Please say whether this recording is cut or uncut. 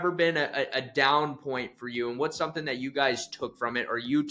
uncut